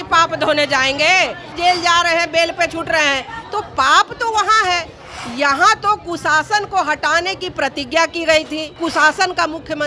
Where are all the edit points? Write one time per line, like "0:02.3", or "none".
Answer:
0:01.6
0:08.7